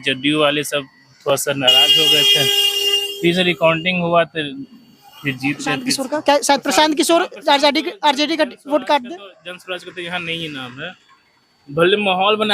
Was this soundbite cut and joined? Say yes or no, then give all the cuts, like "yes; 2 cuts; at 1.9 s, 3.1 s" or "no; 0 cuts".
yes; 1 cut; at 5.9 s